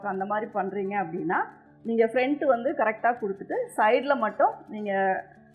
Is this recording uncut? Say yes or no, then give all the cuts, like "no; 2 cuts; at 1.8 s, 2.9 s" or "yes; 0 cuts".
yes; 0 cuts